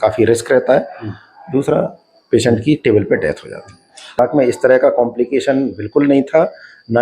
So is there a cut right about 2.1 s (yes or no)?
no